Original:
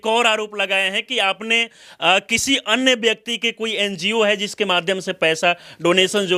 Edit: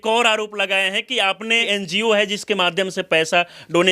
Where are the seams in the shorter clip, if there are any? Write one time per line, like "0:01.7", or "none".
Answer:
0:01.6